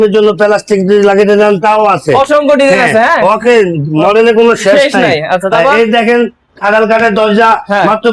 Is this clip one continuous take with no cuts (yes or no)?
yes